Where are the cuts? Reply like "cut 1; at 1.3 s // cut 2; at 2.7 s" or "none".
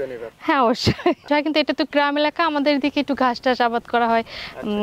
cut 1; at 1.3 s